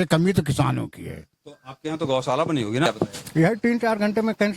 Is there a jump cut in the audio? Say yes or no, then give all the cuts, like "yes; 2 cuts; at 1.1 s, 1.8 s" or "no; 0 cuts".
yes; 1 cut; at 2.9 s